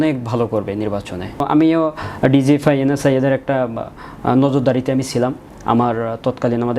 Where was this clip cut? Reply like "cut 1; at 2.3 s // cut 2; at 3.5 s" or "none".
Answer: cut 1; at 1.4 s